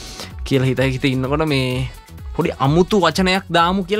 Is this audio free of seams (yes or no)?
yes